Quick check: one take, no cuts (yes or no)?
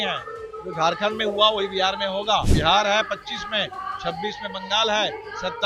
no